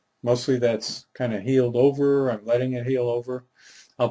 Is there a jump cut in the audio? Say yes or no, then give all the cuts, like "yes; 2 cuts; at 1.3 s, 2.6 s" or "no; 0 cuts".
yes; 1 cut; at 2.4 s